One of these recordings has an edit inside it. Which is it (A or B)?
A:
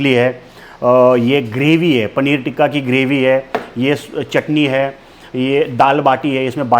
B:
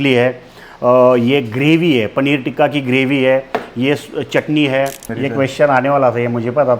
B